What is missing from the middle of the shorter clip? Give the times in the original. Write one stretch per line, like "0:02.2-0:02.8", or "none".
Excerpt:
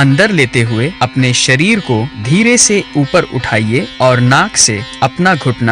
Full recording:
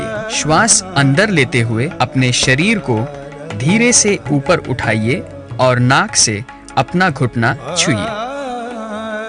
0:03.1-0:03.5
0:05.3-0:05.5
0:06.5-0:06.6